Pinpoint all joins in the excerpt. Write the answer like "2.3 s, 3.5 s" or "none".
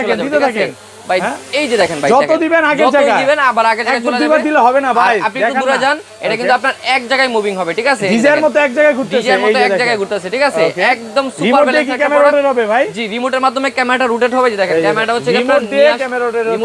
none